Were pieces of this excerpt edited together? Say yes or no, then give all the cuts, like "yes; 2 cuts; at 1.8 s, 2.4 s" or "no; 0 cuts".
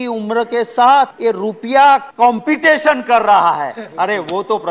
yes; 2 cuts; at 1.1 s, 2.1 s